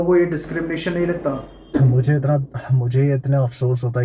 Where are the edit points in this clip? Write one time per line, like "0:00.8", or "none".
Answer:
0:01.6

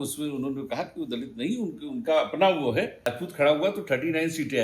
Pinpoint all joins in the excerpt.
0:03.1

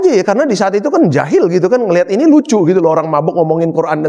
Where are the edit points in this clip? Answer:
none

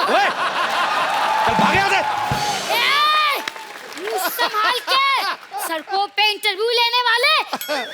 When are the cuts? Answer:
0:02.6
0:05.5

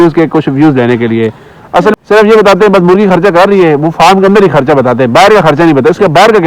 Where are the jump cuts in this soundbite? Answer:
0:02.0

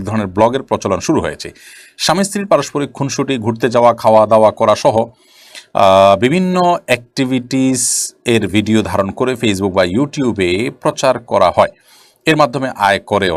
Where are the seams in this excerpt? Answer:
none

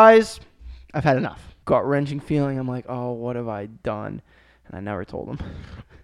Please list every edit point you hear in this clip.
0:01.5

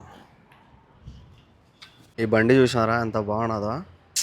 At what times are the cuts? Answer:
0:02.1

